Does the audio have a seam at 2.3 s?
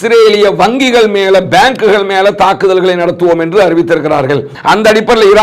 no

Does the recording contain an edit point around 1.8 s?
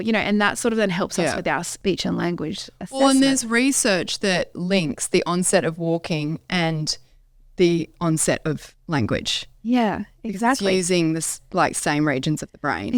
yes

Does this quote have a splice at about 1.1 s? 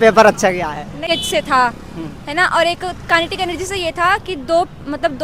yes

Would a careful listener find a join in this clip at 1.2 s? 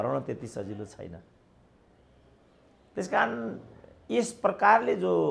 no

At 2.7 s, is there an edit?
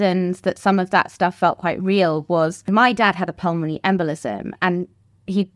yes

